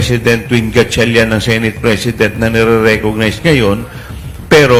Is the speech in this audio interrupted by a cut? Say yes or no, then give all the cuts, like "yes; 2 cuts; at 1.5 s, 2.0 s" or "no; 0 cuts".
no; 0 cuts